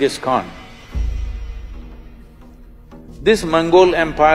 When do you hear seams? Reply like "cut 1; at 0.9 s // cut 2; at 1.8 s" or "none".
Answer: cut 1; at 3.1 s

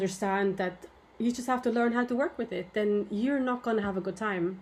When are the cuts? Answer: none

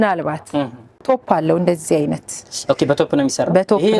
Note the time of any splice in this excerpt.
cut 1; at 1.1 s

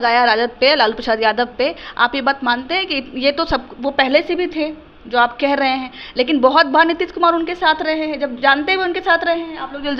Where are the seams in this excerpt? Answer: none

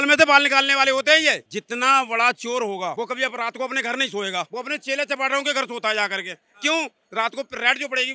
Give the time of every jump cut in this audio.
cut 1; at 1.4 s // cut 2; at 2.9 s // cut 3; at 4.5 s

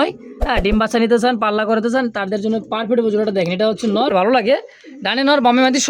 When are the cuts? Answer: cut 1; at 4.1 s

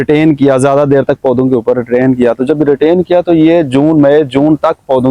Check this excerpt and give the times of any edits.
none

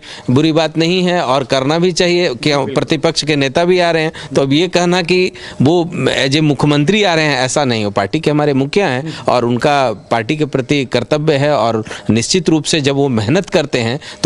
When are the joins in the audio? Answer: none

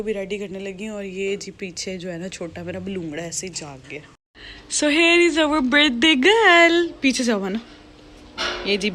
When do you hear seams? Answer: none

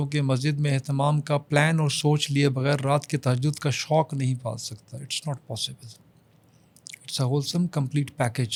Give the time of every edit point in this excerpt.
none

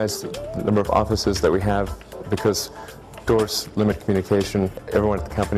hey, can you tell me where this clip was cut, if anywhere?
cut 1; at 2.3 s

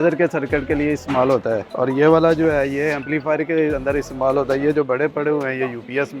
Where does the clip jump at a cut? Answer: cut 1; at 1.7 s

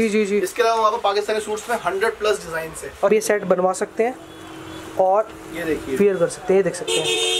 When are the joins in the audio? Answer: cut 1; at 3.1 s

